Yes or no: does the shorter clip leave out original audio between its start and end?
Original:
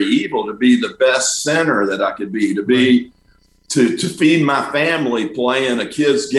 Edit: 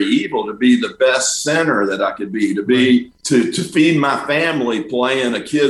yes